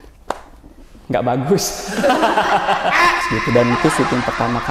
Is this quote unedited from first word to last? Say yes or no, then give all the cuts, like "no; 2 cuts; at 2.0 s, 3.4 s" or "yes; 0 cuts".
no; 1 cut; at 3.3 s